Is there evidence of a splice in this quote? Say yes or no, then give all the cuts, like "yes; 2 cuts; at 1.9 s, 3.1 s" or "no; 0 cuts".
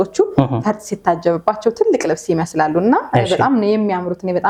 no; 0 cuts